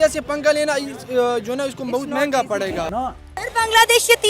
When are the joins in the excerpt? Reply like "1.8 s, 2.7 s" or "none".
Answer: 3.1 s